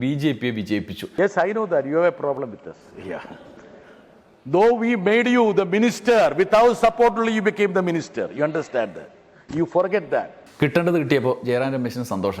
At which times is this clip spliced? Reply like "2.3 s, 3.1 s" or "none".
1.1 s, 10.5 s